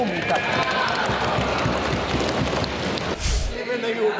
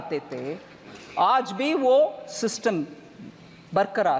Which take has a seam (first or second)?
first